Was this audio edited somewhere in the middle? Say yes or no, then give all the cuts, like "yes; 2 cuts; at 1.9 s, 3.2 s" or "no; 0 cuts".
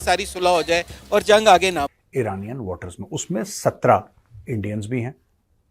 yes; 1 cut; at 2.0 s